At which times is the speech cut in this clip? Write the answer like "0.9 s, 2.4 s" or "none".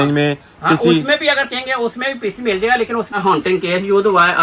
3.2 s